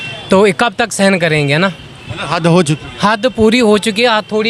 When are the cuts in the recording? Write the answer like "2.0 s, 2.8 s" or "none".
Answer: none